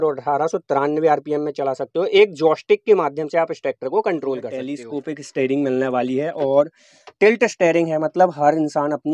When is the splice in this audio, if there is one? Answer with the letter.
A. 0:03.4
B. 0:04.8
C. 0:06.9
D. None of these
B